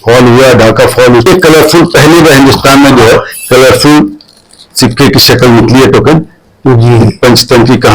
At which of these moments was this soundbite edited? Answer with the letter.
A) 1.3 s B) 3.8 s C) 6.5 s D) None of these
A